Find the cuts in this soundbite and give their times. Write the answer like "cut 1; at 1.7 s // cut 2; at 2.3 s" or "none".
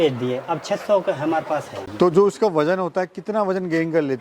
cut 1; at 1.8 s